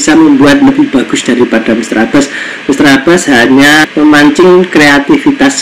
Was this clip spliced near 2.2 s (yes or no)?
no